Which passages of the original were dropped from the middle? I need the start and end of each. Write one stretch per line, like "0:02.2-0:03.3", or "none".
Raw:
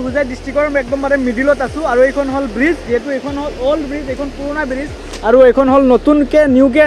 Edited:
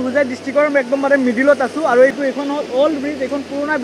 0:02.1-0:03.0